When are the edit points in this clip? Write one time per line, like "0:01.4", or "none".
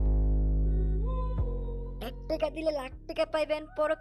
0:01.7